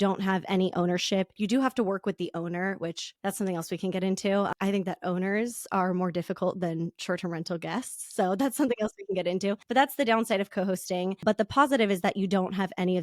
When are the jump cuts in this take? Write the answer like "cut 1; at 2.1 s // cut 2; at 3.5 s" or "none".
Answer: cut 1; at 1.3 s